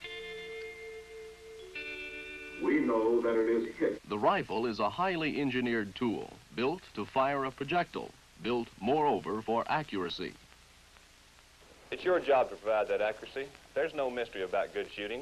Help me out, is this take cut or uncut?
uncut